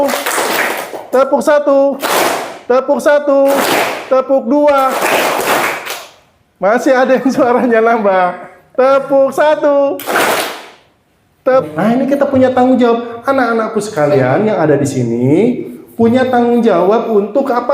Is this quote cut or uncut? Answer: cut